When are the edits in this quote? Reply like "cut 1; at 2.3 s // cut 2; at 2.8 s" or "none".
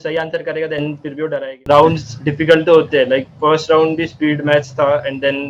cut 1; at 1.6 s